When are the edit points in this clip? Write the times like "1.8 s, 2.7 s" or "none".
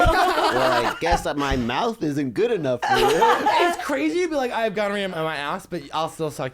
5.1 s